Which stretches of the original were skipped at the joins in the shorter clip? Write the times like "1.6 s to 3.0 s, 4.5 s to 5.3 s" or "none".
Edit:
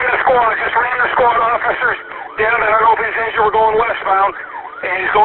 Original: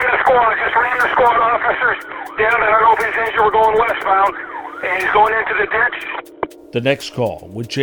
none